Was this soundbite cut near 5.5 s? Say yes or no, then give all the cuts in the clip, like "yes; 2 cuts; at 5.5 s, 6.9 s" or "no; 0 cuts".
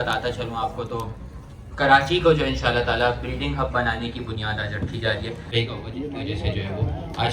yes; 1 cut; at 5.5 s